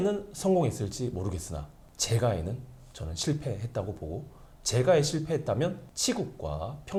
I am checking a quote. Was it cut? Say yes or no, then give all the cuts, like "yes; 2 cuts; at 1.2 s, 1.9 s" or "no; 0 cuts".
no; 0 cuts